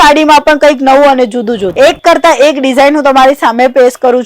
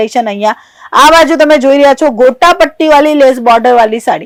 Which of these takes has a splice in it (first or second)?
first